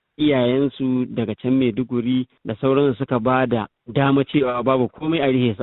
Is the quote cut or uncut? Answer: cut